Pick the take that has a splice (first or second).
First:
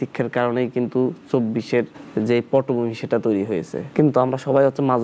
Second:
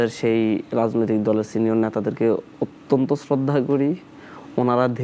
first